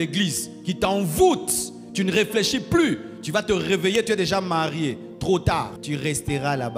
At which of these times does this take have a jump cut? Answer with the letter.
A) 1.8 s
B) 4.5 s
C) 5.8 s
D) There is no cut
C